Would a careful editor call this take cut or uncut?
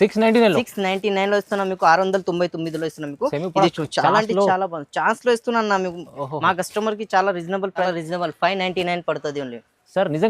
cut